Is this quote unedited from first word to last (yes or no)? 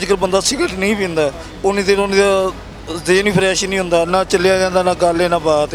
yes